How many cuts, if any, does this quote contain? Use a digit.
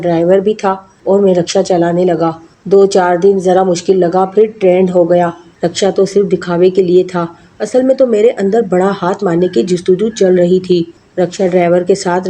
3